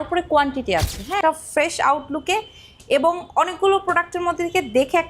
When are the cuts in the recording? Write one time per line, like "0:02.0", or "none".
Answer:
0:01.2